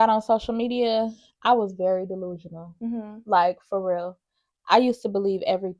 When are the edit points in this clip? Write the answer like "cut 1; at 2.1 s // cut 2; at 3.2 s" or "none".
none

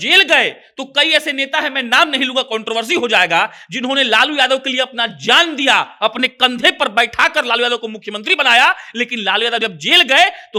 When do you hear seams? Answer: none

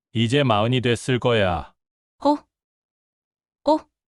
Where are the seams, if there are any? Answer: none

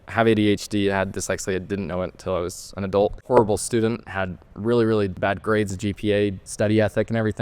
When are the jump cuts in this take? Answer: cut 1; at 3.2 s // cut 2; at 5.1 s // cut 3; at 6.4 s

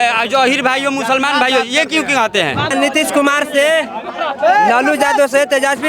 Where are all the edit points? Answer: cut 1; at 2.7 s

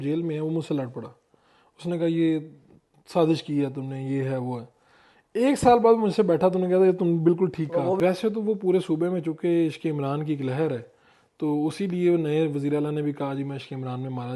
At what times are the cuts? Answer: cut 1; at 8.0 s

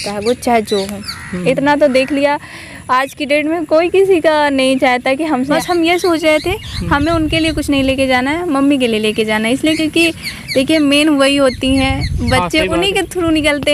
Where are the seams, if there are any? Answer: cut 1; at 5.5 s

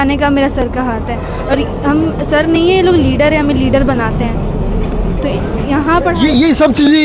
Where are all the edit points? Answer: none

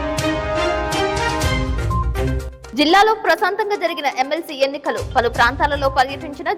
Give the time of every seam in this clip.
cut 1; at 2.5 s

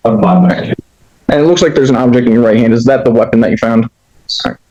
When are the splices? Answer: none

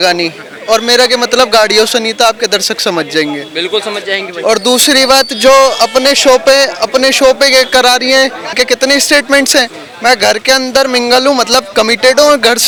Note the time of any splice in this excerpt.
none

